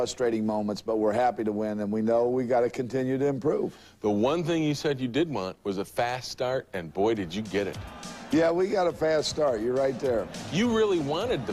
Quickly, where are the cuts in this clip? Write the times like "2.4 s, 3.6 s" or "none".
6.0 s